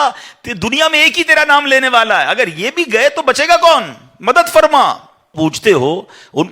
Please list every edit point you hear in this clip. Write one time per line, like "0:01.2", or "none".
0:05.3

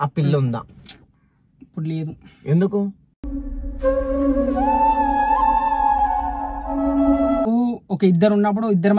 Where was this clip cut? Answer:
0:07.5

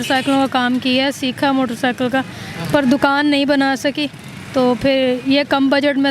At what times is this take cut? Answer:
none

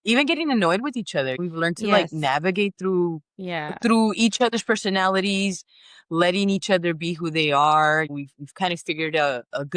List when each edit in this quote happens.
0:01.4
0:08.1

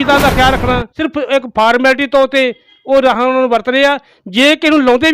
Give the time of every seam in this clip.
0:00.9

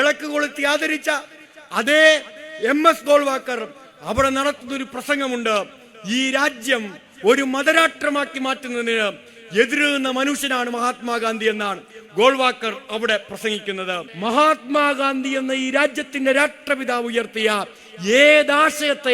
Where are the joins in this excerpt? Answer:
0:14.1

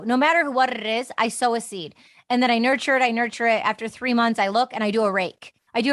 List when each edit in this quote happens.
none

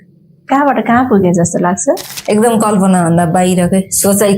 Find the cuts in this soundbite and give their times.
0:02.1

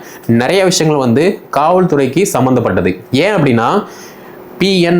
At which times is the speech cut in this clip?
none

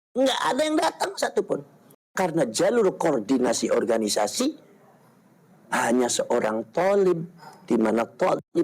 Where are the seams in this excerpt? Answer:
0:02.0

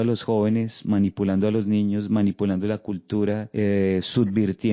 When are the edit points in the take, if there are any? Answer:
0:03.5

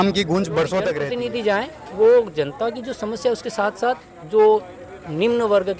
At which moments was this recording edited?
0:01.0

